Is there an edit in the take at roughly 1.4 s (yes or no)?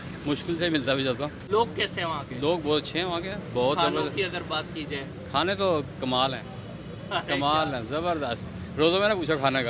yes